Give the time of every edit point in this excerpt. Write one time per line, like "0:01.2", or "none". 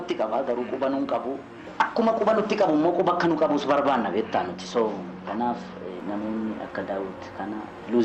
0:01.6
0:06.0